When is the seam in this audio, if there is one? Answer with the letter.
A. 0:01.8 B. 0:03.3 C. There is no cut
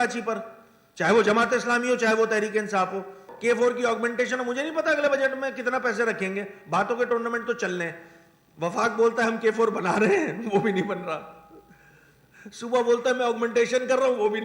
B